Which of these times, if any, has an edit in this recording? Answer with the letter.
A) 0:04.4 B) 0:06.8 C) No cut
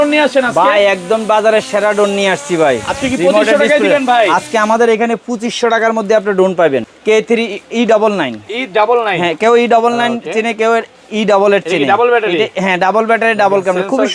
B